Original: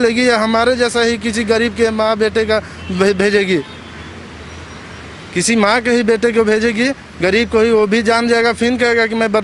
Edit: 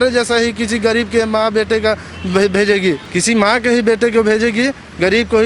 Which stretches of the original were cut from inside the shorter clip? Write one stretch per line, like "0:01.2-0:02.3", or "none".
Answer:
0:03.7-0:05.3